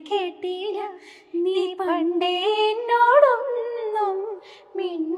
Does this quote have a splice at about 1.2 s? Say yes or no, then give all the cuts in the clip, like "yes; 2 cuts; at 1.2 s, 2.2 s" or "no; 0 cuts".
no; 0 cuts